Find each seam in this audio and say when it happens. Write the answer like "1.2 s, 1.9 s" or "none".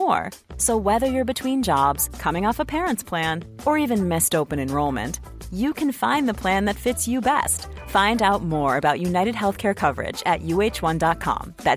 none